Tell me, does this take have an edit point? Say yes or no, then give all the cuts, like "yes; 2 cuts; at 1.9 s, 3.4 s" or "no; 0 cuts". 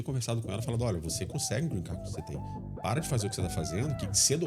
no; 0 cuts